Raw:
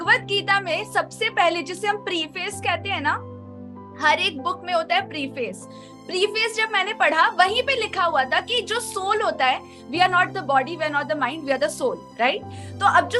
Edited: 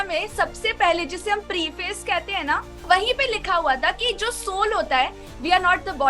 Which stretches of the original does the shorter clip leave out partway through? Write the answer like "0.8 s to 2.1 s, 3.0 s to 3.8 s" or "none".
3.4 s to 7.3 s